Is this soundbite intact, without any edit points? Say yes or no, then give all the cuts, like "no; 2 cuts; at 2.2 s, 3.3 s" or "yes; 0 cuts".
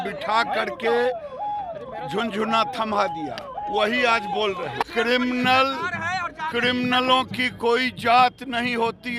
no; 1 cut; at 4.9 s